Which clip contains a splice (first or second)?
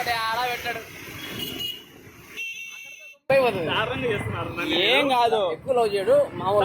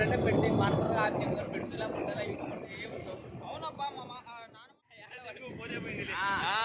first